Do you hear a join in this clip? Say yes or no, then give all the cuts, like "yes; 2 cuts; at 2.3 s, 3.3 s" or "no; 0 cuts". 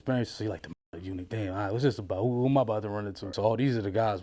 yes; 1 cut; at 3.3 s